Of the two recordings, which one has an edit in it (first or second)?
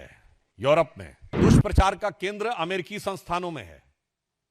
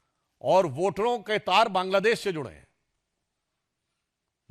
first